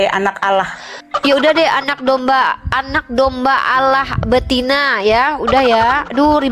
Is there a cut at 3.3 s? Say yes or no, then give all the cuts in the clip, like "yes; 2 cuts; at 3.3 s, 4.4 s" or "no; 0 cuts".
no; 0 cuts